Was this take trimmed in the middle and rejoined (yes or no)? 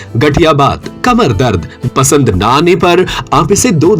yes